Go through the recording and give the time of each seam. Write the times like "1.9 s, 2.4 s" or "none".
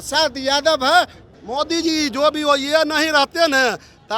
1.2 s